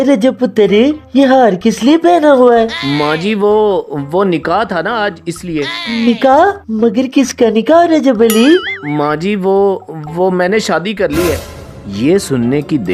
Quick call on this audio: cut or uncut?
uncut